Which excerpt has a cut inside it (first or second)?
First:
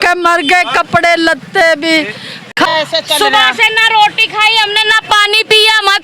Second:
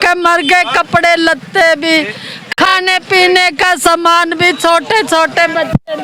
first